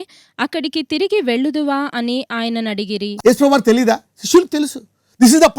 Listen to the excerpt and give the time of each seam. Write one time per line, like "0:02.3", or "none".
0:03.1